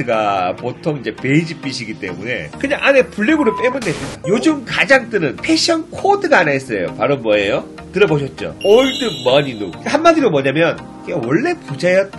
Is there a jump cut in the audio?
yes; 1 cut; at 4.1 s

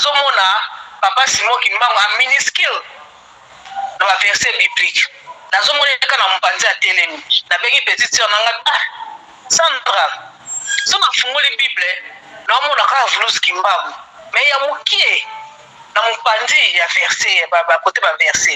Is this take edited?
no; 0 cuts

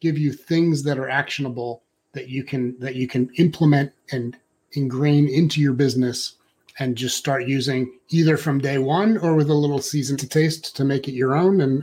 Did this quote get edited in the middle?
yes; 1 cut; at 10.2 s

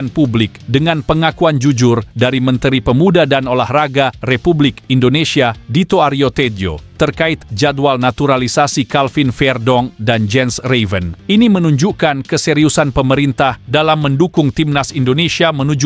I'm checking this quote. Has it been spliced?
no; 0 cuts

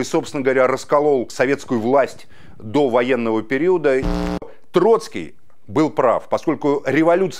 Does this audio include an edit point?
yes; 2 cuts; at 1.3 s, 4.4 s

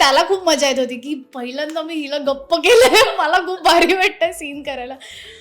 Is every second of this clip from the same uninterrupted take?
yes; 0 cuts

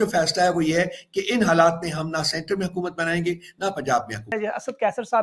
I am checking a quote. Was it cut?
yes; 1 cut; at 4.3 s

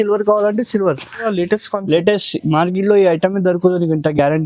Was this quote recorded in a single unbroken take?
no; 1 cut; at 1.3 s

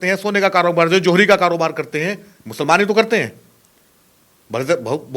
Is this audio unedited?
yes; 0 cuts

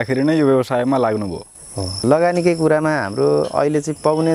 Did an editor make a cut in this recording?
yes; 1 cut; at 2.0 s

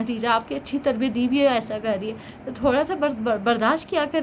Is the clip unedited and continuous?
yes; 0 cuts

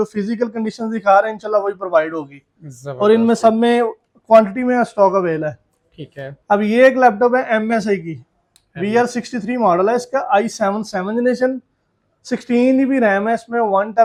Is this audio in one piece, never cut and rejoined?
yes; 0 cuts

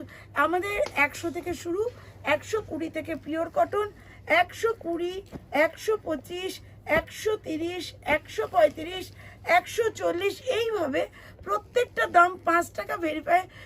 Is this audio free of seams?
yes; 0 cuts

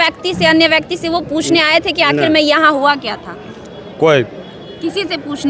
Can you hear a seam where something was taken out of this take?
no; 0 cuts

